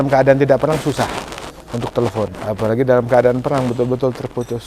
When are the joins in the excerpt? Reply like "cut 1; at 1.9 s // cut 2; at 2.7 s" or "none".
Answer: cut 1; at 2.4 s